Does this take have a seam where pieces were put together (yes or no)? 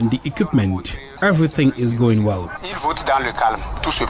yes